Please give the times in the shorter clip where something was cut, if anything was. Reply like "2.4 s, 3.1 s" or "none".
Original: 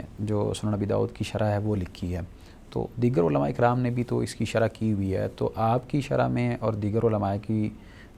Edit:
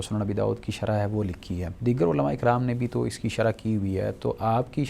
1.8 s